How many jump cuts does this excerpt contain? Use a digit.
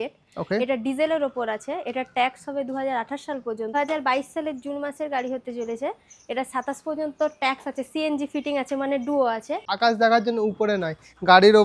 2